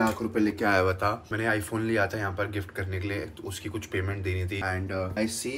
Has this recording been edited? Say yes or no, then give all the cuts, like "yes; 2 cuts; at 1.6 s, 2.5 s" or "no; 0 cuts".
yes; 2 cuts; at 1.3 s, 4.6 s